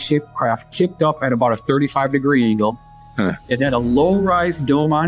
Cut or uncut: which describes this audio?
uncut